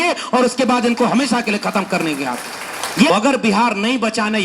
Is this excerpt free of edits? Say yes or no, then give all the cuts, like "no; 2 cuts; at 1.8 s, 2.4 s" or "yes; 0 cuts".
no; 1 cut; at 3.1 s